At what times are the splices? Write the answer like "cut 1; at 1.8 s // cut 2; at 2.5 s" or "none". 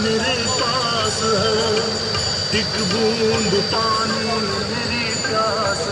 none

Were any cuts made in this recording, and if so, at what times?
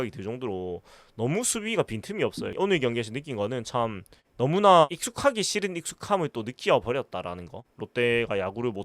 cut 1; at 2.5 s

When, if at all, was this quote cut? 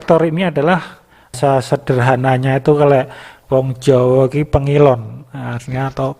cut 1; at 1.3 s

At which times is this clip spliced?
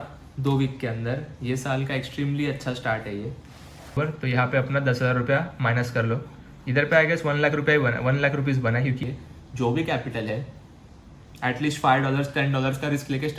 cut 1; at 3.9 s // cut 2; at 9.0 s

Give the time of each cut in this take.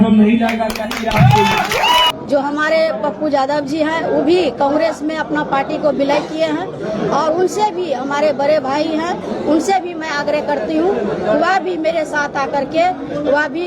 cut 1; at 2.1 s

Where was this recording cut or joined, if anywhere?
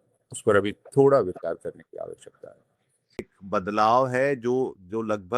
cut 1; at 3.3 s

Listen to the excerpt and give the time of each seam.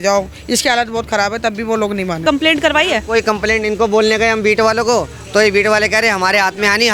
cut 1; at 2.2 s

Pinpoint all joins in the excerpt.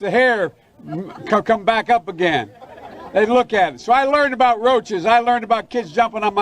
cut 1; at 3.8 s

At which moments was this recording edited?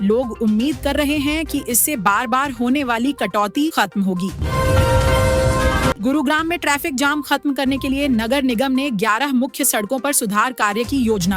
cut 1; at 4.4 s // cut 2; at 6.0 s

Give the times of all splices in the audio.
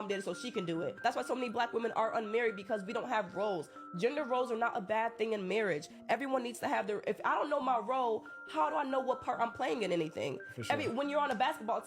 cut 1; at 5.5 s // cut 2; at 10.5 s

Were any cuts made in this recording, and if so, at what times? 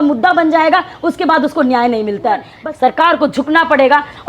cut 1; at 2.5 s

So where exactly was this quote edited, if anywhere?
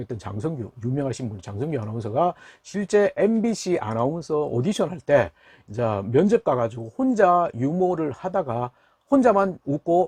none

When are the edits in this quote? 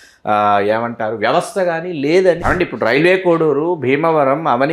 cut 1; at 2.4 s

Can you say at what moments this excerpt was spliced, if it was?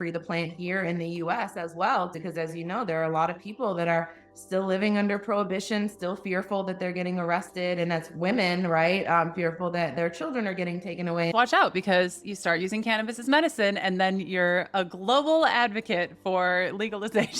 cut 1; at 2.2 s // cut 2; at 11.3 s

